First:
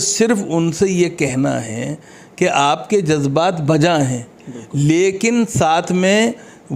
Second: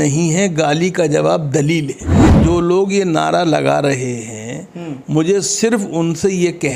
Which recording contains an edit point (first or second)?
second